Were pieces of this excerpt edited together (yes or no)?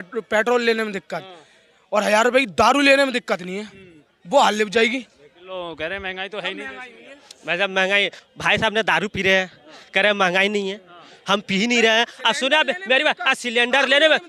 no